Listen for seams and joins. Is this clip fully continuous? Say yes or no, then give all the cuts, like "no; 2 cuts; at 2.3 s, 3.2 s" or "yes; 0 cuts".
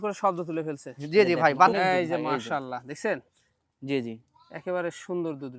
no; 1 cut; at 1.7 s